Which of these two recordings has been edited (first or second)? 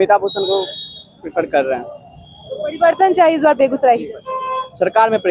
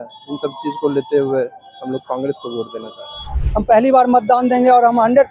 second